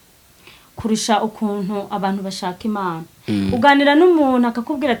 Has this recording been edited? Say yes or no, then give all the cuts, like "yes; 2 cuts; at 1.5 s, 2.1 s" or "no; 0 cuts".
no; 0 cuts